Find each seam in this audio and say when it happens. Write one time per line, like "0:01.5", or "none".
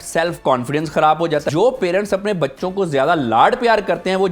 0:01.4